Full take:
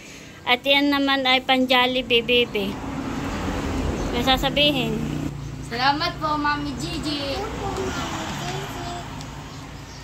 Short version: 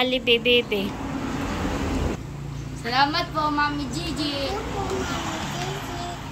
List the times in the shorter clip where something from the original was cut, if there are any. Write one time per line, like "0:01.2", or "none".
0:02.2